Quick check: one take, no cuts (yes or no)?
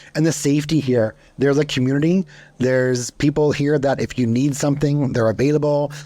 no